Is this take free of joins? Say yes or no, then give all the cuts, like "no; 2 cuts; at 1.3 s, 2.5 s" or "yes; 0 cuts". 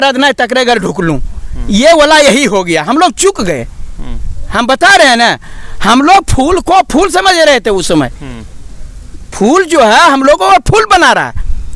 yes; 0 cuts